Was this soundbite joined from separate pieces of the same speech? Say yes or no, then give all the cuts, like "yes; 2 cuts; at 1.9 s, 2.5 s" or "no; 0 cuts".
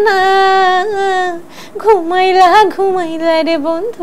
no; 0 cuts